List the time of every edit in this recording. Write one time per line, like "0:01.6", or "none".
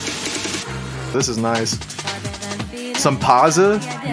0:01.1